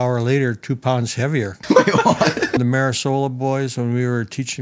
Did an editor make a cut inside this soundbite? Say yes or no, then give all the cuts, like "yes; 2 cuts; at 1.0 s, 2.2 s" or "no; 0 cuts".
yes; 2 cuts; at 1.6 s, 2.6 s